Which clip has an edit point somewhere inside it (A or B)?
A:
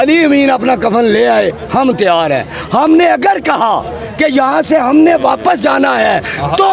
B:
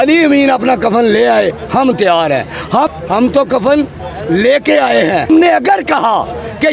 B